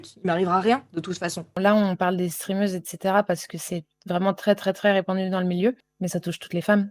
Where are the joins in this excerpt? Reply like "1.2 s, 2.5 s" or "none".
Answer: 1.5 s, 5.9 s